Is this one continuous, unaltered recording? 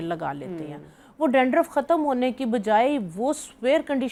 yes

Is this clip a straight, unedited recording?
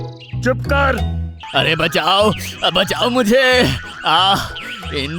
no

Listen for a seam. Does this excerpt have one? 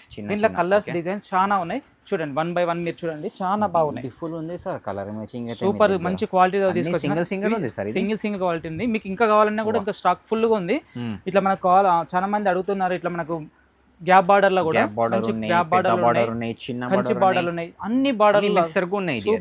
no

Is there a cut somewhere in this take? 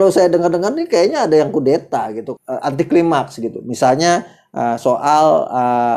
yes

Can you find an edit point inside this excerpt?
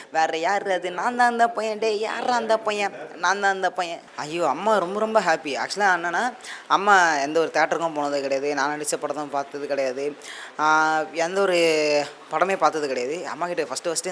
yes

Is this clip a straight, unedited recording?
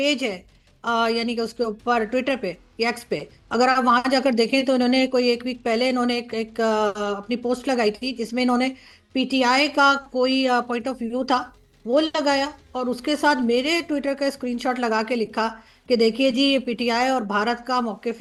yes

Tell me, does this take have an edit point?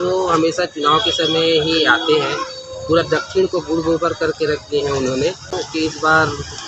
yes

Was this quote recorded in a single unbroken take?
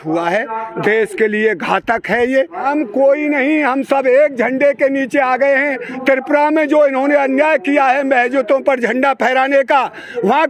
no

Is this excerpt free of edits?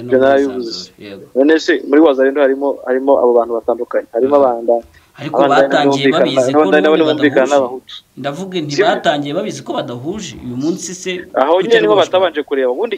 yes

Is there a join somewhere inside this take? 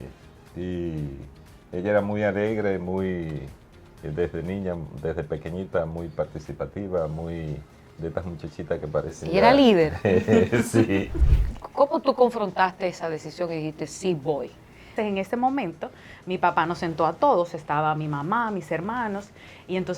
yes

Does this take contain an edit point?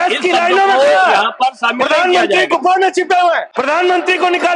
yes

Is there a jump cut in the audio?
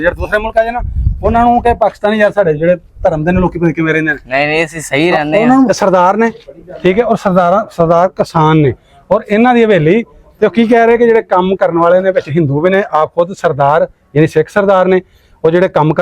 yes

